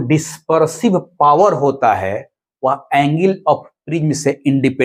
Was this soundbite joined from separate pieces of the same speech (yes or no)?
no